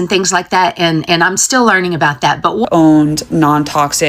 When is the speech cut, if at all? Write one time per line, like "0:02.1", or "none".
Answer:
0:02.6